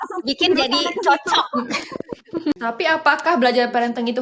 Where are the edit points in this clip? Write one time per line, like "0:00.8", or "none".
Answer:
0:02.5